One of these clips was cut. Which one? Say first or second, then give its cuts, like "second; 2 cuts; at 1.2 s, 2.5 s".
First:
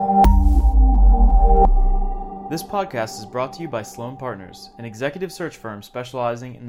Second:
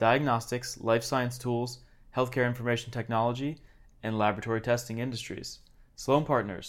first; 1 cut; at 2.5 s